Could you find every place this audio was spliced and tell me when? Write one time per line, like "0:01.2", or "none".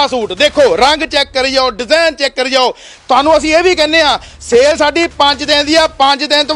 none